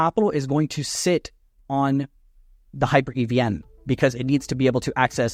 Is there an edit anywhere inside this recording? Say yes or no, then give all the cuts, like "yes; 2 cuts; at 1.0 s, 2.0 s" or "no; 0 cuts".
no; 0 cuts